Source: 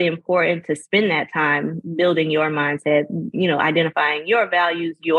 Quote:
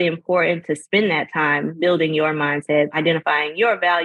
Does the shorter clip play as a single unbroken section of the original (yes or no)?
no